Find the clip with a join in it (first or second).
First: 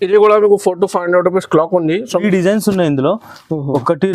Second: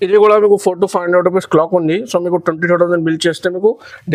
first